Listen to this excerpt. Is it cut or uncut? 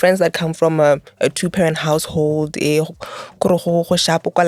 uncut